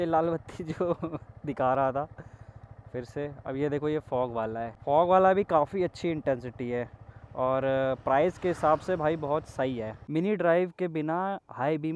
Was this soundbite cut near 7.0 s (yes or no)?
no